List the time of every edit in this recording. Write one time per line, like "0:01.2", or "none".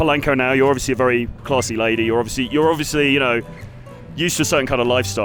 none

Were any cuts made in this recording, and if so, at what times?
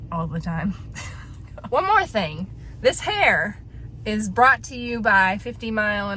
none

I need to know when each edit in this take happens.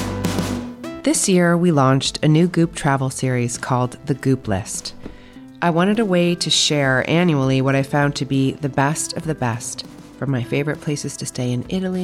0:01.0

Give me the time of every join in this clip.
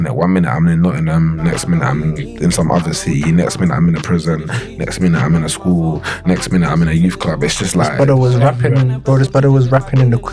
none

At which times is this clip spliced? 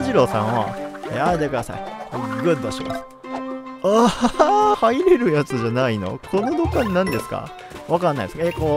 0:04.7

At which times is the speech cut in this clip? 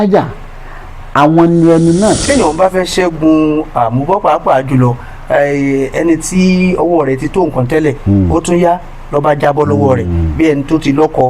0:02.2

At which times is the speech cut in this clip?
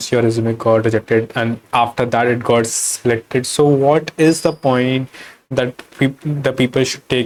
none

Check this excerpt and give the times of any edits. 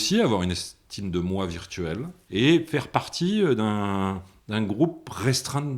0:02.2

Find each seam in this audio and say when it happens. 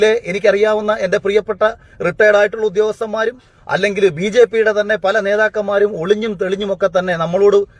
none

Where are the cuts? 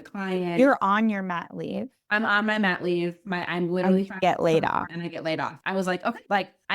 0:05.6

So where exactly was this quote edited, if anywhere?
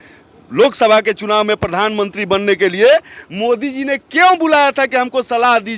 none

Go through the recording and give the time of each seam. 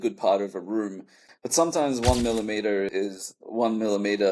0:01.3
0:02.9

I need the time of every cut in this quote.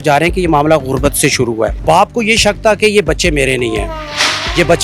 0:01.8

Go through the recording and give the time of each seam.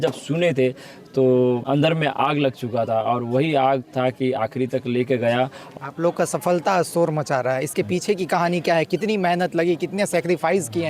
0:01.6
0:05.6

